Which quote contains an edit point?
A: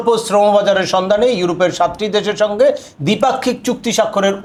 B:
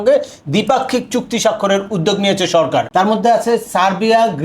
B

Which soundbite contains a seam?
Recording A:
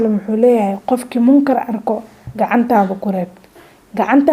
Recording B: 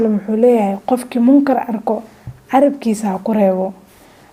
A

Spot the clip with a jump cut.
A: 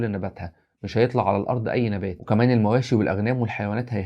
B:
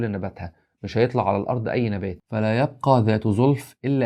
A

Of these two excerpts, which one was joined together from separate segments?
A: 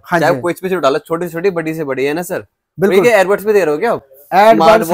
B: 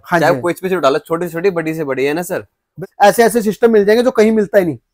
B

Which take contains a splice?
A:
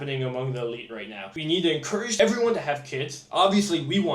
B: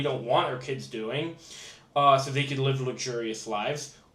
A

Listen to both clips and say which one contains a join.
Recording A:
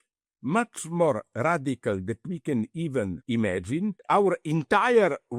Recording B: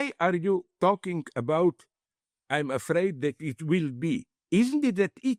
A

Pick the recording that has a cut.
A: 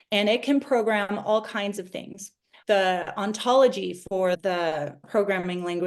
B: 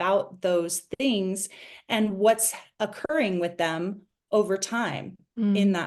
A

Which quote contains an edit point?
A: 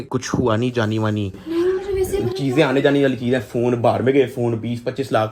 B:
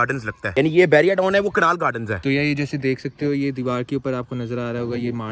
B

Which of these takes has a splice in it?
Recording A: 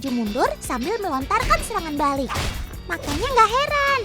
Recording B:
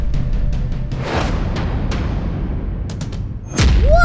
B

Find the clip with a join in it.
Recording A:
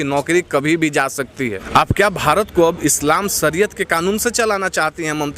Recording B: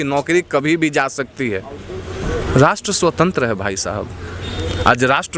A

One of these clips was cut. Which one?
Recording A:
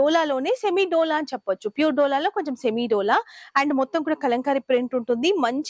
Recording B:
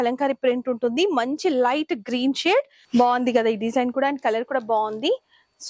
B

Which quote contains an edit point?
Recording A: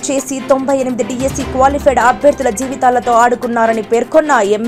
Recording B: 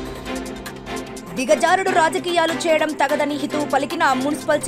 B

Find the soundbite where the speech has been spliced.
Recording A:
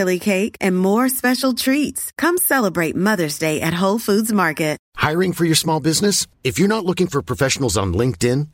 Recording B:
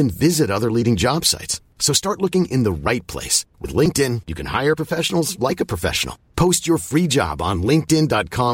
A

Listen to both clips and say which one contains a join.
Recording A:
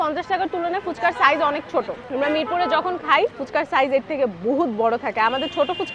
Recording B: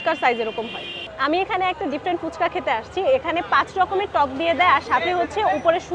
B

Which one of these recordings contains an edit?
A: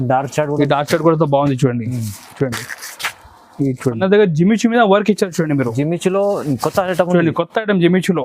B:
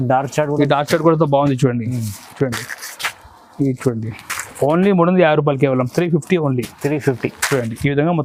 A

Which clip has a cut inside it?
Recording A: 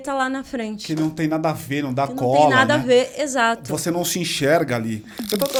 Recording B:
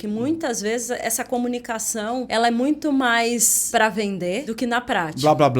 B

